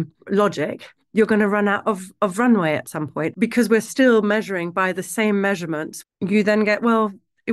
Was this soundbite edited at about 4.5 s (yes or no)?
no